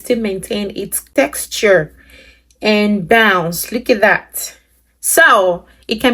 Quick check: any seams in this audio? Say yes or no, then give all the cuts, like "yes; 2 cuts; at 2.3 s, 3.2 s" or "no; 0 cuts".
yes; 1 cut; at 0.9 s